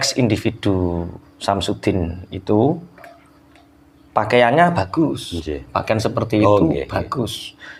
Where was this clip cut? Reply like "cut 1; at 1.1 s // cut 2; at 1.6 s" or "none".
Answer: none